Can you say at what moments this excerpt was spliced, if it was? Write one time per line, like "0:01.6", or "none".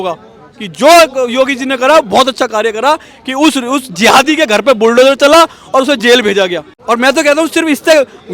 0:06.7